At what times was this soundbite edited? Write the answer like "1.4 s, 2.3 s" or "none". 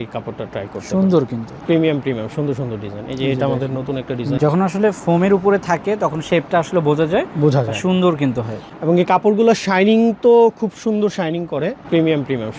1.5 s, 4.4 s, 11.8 s

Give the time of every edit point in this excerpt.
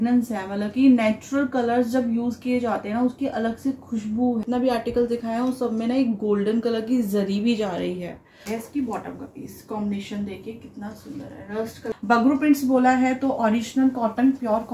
4.4 s, 8.6 s, 11.9 s

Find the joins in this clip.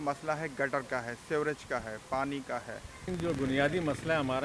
3.1 s

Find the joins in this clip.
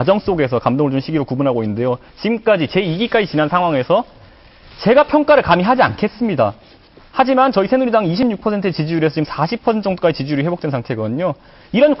8.4 s

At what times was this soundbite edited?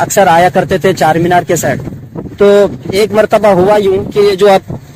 none

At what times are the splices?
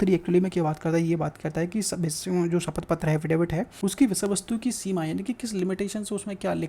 3.7 s

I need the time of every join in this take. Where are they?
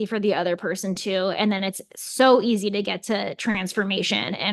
none

